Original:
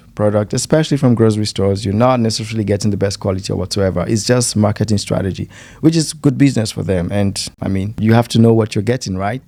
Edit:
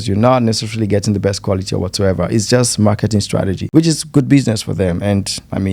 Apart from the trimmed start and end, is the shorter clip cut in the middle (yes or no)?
yes